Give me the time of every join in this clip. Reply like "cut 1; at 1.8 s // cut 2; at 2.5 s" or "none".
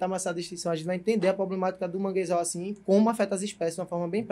none